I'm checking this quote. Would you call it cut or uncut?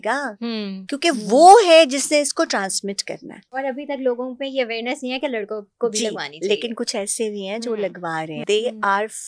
cut